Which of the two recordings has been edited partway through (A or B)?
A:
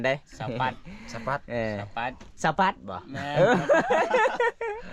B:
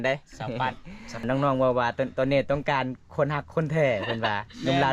B